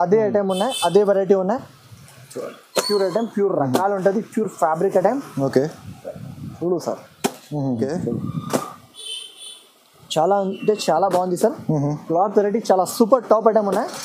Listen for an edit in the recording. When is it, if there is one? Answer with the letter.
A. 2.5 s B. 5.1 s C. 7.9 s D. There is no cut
C